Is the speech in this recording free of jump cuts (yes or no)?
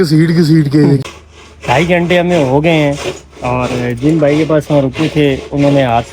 no